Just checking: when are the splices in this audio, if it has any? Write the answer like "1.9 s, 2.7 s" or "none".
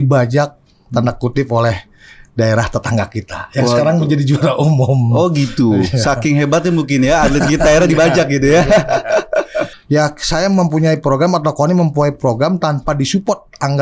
9.7 s